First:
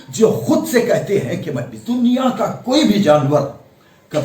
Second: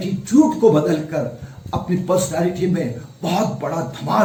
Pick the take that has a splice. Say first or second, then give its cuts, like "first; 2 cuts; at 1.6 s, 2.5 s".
first; 1 cut; at 1.7 s